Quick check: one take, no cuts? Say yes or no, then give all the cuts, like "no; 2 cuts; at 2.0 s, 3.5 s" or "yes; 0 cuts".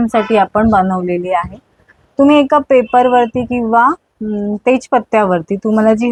yes; 0 cuts